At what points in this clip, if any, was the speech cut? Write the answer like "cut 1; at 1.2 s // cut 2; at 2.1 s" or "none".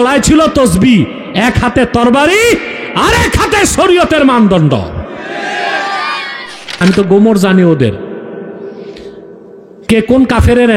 cut 1; at 6.8 s